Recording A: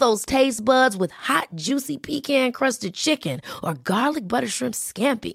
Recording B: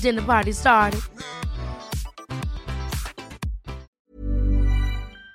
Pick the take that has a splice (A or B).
B